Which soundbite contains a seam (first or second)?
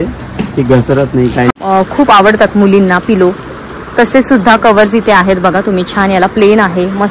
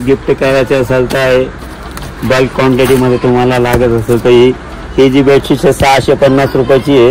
first